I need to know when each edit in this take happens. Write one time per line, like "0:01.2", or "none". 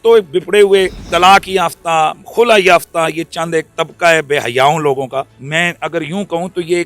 0:01.0
0:05.4

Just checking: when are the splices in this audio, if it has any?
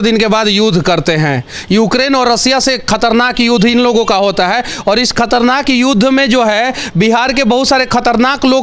none

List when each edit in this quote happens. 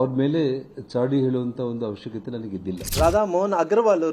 none

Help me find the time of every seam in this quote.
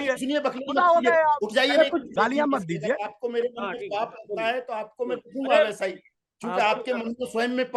0:02.0

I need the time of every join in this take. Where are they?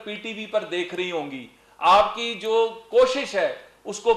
none

